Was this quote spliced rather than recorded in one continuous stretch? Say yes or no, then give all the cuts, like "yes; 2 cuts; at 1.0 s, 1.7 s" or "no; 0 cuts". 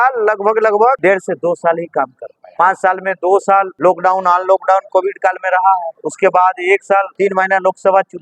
yes; 5 cuts; at 1.0 s, 2.4 s, 3.7 s, 6.0 s, 7.1 s